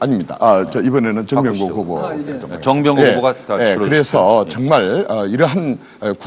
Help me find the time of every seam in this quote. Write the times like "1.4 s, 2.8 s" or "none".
2.5 s